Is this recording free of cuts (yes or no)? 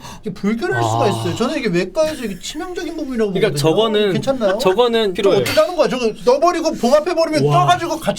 no